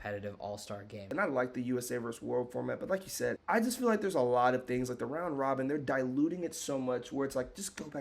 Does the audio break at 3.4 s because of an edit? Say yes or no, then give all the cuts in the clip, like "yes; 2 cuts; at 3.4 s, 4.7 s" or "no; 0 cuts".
yes; 2 cuts; at 1.0 s, 3.4 s